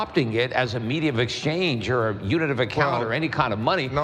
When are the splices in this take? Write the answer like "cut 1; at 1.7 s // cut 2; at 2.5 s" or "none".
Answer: none

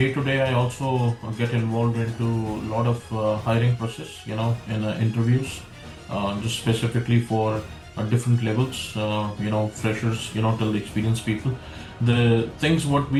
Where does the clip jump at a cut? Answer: none

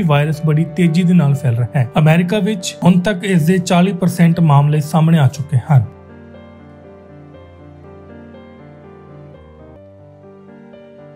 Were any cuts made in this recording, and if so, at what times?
cut 1; at 9.8 s

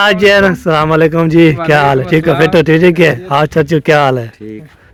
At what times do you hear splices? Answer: none

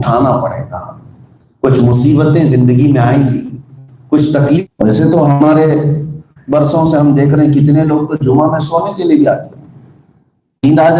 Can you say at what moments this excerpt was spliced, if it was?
cut 1; at 4.4 s

